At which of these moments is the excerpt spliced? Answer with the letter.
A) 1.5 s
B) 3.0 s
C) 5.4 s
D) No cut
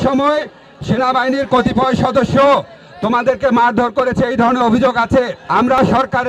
C